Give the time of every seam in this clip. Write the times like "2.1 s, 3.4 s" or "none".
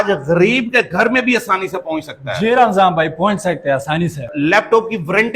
4.2 s